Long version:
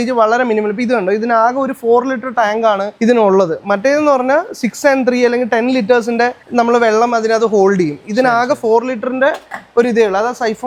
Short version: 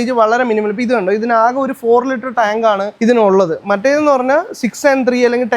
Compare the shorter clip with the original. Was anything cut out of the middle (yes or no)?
no